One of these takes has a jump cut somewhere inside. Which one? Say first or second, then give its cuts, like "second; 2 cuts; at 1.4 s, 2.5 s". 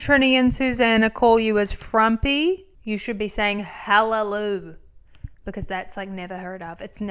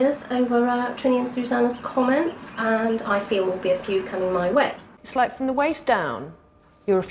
second; 1 cut; at 4.9 s